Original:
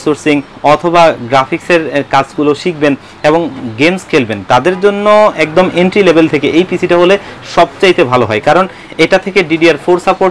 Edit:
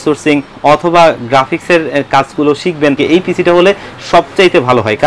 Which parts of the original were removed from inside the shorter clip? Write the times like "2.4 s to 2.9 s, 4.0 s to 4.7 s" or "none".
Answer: 3.0 s to 6.4 s